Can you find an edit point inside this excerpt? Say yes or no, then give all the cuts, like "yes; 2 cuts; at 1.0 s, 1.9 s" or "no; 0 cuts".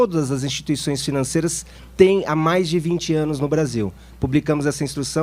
yes; 1 cut; at 3.6 s